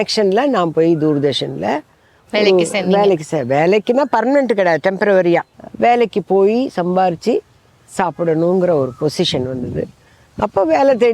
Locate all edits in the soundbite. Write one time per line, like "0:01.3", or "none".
0:05.6

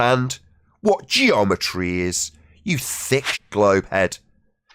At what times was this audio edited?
0:03.4

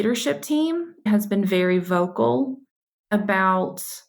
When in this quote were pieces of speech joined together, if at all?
0:01.0

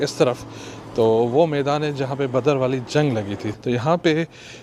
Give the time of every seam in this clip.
0:03.5

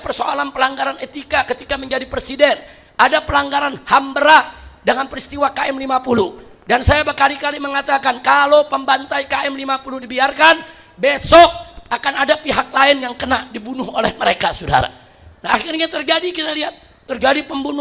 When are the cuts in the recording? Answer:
none

